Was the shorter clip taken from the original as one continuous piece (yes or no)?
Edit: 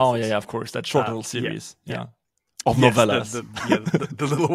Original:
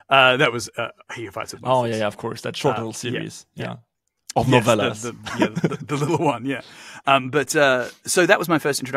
yes